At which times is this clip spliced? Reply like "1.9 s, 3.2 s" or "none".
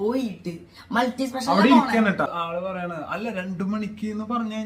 2.3 s

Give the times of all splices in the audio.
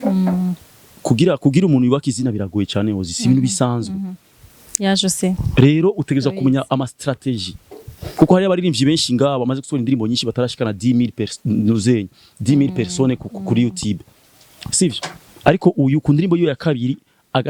none

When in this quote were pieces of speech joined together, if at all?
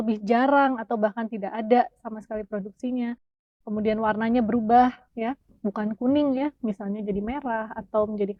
none

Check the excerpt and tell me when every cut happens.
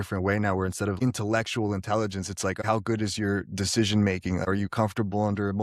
1.0 s, 2.6 s

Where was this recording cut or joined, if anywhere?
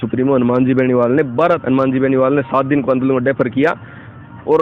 1.6 s

